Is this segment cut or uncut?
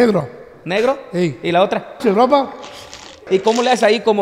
cut